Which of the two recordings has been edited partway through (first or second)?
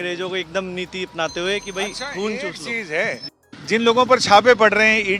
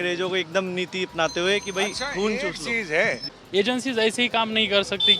second